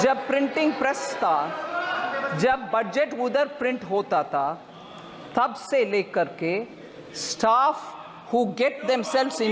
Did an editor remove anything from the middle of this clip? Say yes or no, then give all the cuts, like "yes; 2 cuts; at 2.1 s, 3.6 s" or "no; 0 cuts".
no; 0 cuts